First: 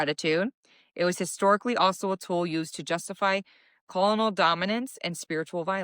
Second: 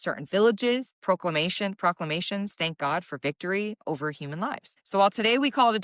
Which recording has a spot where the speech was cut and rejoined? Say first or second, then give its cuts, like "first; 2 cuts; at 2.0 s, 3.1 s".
second; 2 cuts; at 0.9 s, 4.7 s